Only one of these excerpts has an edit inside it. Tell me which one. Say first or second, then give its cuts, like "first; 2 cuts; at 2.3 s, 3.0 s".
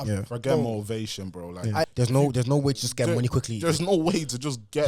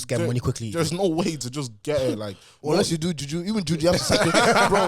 first; 1 cut; at 1.9 s